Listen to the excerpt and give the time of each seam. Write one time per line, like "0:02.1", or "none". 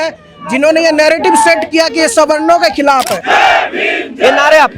0:03.2